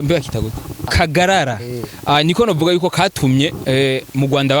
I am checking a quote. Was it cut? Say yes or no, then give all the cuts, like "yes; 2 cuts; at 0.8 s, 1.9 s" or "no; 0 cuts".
yes; 1 cut; at 0.9 s